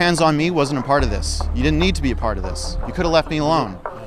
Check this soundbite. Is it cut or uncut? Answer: uncut